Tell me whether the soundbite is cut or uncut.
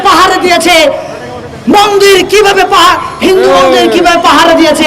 uncut